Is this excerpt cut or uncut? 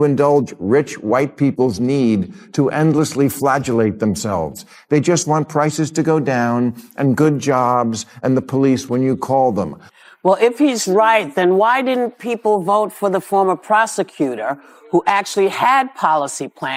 uncut